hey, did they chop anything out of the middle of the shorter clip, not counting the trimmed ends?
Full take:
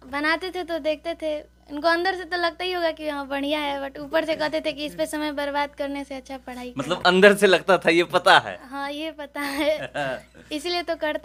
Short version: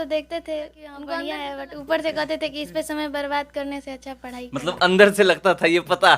yes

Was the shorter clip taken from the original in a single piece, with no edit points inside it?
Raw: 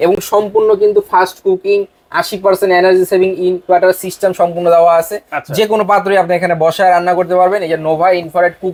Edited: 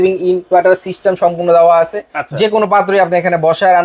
yes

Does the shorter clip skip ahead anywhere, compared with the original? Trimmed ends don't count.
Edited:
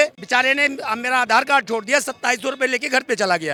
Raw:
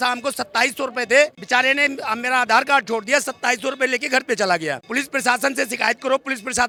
no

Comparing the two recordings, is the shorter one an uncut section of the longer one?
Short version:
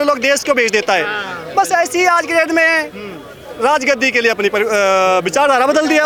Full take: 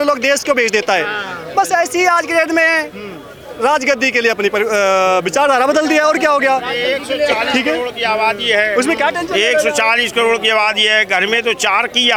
yes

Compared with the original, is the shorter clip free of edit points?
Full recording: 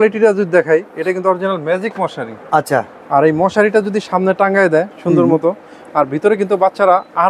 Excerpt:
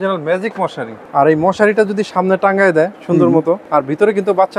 no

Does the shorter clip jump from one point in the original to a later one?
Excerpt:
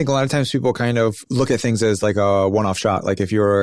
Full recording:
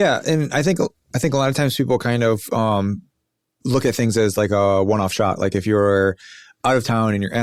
yes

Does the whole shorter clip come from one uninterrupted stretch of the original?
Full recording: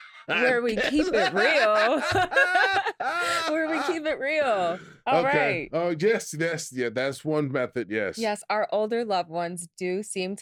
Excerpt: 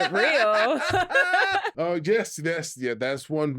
no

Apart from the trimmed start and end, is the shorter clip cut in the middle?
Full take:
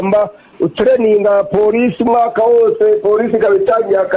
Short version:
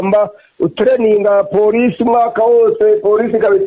no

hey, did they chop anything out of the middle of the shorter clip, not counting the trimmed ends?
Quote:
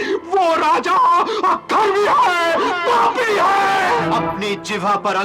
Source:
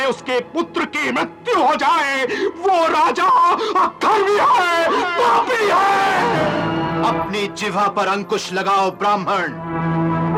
yes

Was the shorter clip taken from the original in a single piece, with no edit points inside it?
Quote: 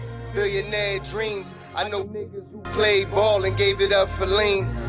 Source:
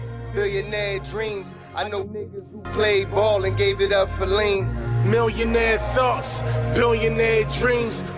yes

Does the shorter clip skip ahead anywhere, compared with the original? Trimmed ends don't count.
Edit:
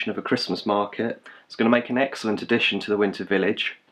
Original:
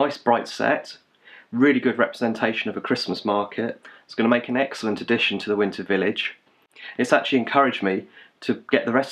no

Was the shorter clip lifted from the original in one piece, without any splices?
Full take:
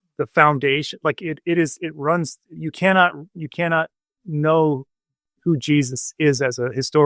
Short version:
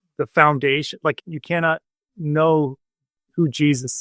no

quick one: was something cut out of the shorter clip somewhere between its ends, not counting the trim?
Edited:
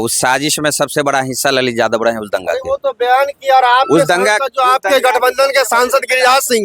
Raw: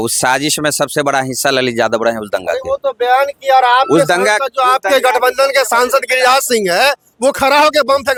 no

